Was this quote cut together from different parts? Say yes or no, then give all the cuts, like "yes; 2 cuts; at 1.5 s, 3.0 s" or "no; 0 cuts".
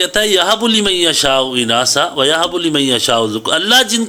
no; 0 cuts